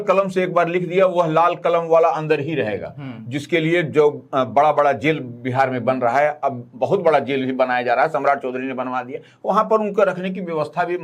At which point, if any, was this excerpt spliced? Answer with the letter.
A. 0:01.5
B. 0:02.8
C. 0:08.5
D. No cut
D